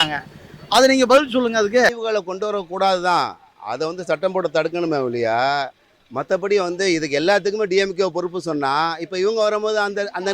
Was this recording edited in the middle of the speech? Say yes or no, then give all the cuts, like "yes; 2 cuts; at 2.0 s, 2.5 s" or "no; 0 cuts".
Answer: yes; 1 cut; at 1.9 s